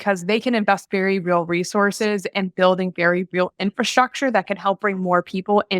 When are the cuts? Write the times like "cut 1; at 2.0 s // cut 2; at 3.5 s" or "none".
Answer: none